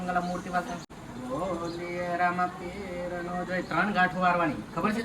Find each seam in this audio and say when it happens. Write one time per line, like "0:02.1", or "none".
0:01.0